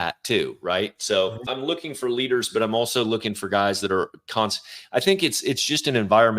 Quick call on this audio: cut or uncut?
cut